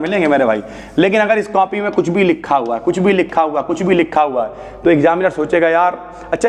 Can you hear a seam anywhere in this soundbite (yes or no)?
no